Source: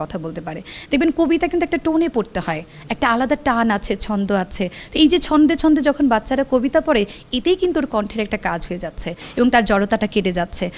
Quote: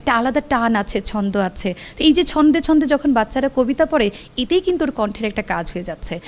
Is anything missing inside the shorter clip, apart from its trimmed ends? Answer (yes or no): no